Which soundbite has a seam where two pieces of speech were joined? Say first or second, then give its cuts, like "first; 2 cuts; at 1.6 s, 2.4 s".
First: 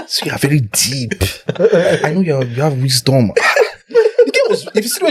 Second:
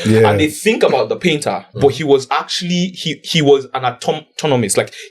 second; 1 cut; at 1.6 s